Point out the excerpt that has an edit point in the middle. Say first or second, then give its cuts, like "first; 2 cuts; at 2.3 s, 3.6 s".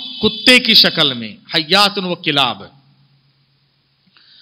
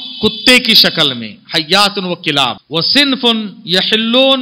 second; 1 cut; at 2.6 s